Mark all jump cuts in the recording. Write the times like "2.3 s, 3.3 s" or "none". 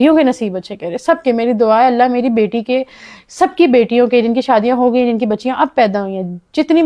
none